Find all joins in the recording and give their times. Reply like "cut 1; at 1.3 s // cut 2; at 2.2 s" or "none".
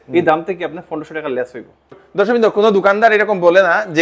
cut 1; at 1.9 s